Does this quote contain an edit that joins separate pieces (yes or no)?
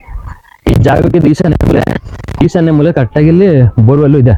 no